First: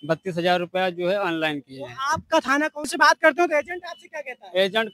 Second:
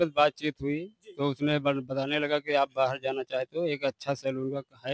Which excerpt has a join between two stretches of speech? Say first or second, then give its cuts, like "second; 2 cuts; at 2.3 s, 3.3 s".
first; 1 cut; at 2.9 s